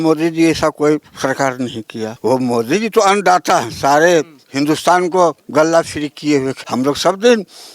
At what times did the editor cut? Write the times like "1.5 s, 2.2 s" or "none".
2.1 s, 6.6 s

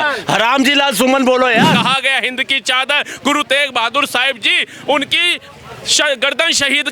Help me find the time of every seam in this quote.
1.7 s

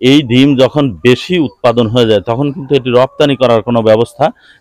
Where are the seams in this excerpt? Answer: none

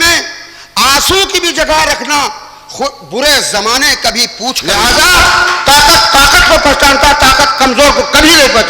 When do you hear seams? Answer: 4.6 s

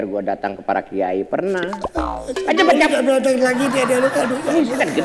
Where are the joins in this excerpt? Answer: none

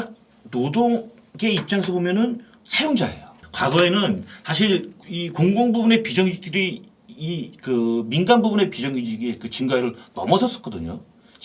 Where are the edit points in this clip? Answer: 3.4 s

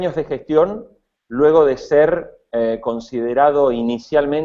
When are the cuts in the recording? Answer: none

